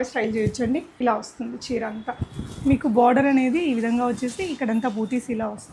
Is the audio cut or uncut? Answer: cut